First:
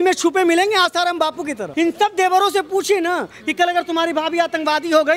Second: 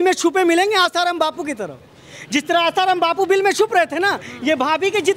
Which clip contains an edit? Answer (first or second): first